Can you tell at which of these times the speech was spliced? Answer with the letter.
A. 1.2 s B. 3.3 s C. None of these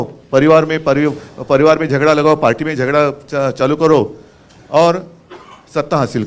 C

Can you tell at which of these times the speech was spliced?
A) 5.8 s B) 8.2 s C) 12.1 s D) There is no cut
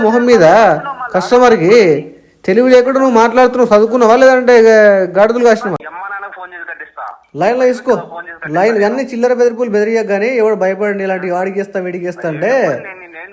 A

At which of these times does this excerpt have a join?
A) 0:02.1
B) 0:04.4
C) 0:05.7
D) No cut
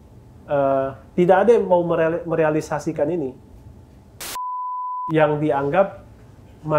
B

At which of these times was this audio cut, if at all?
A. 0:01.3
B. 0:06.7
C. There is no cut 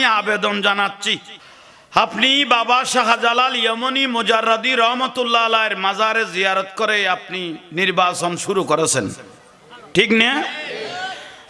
A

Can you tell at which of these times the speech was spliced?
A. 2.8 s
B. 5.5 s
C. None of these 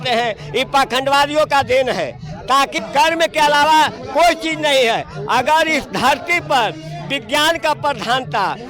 A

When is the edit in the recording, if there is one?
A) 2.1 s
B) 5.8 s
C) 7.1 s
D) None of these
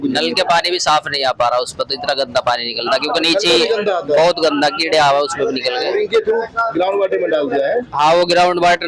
D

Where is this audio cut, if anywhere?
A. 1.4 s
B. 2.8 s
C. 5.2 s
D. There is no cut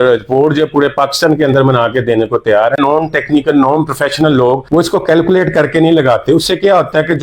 B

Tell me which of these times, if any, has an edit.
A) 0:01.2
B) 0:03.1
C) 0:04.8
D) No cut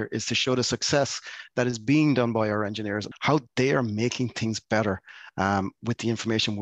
B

